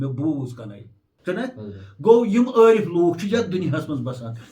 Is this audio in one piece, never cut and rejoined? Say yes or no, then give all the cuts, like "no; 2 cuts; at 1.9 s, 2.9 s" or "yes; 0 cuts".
no; 1 cut; at 1.0 s